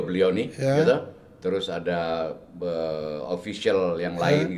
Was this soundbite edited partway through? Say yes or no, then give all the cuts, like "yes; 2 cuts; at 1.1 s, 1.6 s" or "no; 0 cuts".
no; 0 cuts